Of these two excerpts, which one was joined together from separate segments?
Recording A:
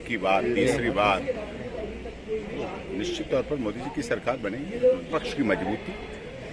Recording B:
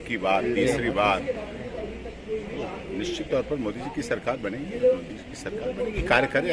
A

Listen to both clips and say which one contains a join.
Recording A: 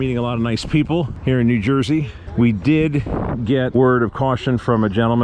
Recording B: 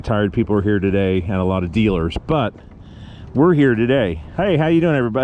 A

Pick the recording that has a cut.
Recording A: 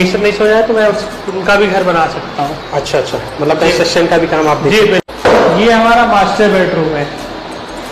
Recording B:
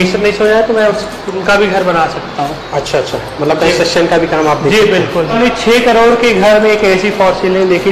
A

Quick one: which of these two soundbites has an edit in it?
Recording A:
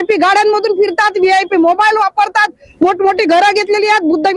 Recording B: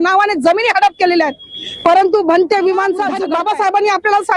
B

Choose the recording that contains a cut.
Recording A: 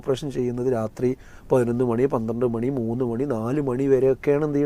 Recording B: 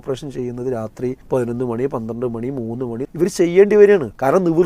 B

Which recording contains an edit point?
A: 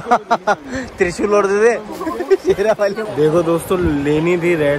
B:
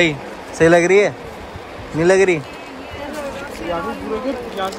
A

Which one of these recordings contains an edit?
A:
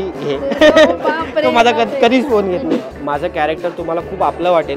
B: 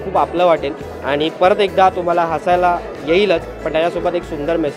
A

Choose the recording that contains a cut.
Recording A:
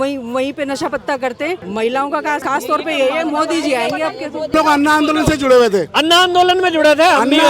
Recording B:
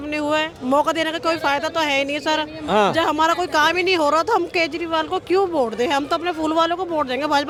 A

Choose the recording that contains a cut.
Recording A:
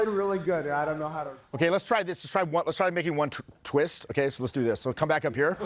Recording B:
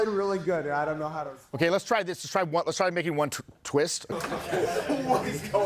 B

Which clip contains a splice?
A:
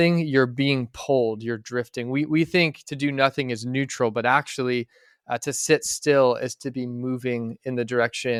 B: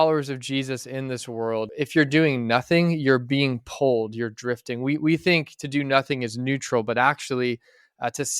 B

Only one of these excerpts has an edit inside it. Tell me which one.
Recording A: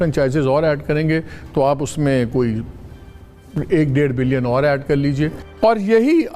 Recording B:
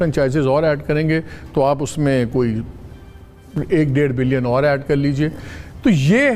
A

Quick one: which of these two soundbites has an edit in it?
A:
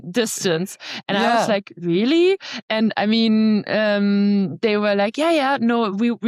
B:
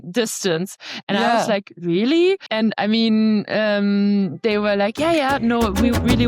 B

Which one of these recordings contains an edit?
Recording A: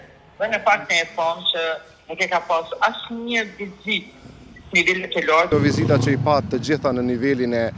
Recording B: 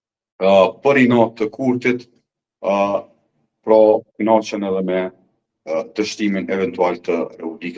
A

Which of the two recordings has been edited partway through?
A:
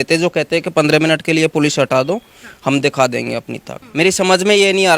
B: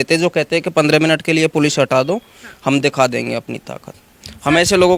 A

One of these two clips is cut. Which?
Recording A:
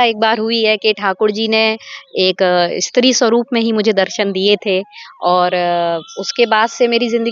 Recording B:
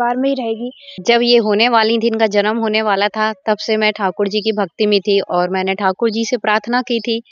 B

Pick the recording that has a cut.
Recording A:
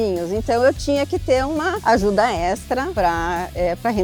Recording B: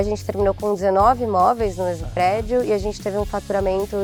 A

